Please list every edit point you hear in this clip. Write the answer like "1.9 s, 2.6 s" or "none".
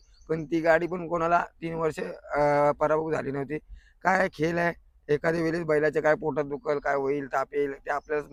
none